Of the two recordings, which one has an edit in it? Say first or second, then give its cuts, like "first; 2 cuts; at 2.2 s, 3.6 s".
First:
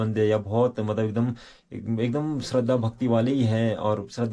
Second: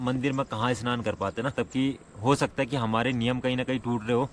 second; 1 cut; at 1.5 s